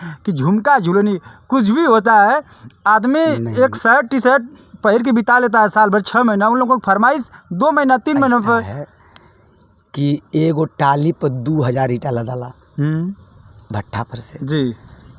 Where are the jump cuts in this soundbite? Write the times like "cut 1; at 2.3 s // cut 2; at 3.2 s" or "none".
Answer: none